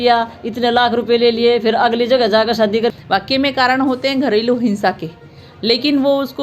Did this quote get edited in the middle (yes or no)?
yes